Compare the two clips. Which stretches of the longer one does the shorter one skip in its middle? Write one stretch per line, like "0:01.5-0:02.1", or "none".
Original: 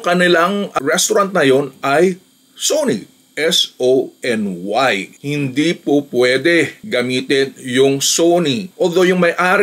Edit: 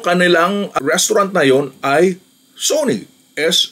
none